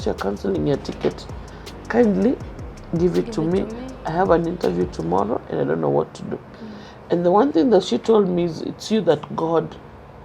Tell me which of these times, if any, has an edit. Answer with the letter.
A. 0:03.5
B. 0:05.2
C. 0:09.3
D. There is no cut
D